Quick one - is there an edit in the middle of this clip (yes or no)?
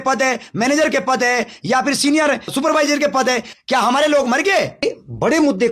yes